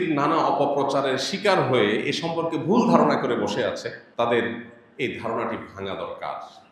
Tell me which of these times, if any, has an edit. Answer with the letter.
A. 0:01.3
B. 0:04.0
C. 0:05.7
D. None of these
B